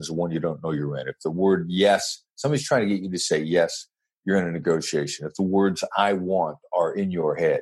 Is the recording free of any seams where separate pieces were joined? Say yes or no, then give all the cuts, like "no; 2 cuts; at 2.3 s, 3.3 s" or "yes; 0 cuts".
yes; 0 cuts